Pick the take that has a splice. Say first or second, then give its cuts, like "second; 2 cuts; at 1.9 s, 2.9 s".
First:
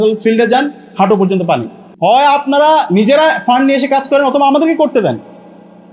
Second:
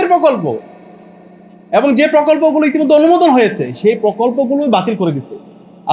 first; 1 cut; at 1.8 s